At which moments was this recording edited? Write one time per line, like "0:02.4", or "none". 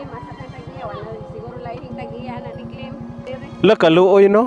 0:03.2